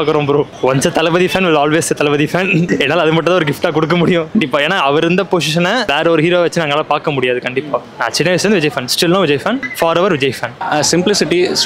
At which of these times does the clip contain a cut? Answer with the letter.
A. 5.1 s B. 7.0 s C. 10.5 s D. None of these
C